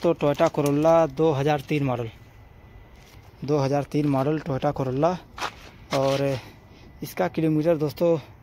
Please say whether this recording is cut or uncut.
uncut